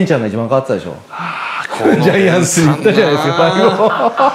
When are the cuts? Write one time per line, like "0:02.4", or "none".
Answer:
none